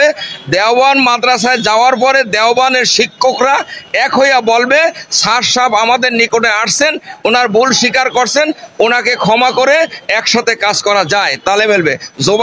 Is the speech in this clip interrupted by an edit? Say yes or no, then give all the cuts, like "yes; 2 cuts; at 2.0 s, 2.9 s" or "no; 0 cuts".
no; 0 cuts